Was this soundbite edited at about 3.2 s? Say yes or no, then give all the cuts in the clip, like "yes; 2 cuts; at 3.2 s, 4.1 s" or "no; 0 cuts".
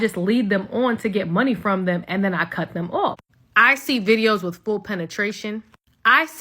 yes; 1 cut; at 3.2 s